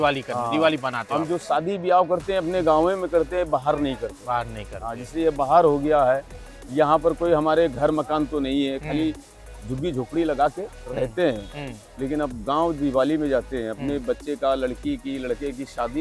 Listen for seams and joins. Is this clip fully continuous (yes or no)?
yes